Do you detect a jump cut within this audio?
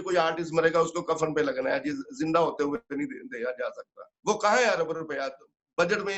no; 0 cuts

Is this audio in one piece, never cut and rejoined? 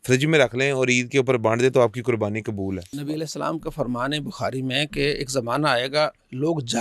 no; 1 cut; at 2.9 s

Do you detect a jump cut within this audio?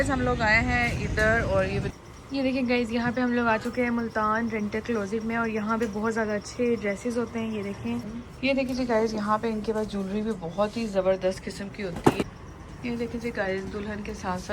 yes; 3 cuts; at 2.0 s, 8.1 s, 12.2 s

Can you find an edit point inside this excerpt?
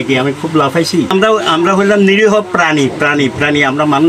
yes; 1 cut; at 1.1 s

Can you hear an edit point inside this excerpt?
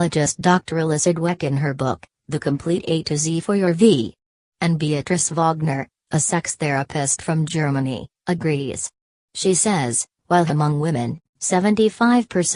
no; 0 cuts

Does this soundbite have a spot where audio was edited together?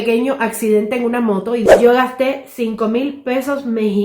yes; 1 cut; at 1.6 s

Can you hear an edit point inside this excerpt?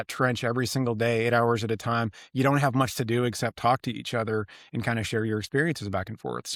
no; 0 cuts

